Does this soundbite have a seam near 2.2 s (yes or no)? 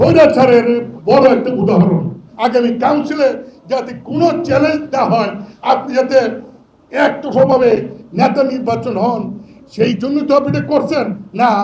yes